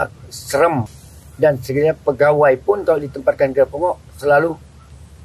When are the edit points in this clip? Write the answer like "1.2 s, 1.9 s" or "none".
0.9 s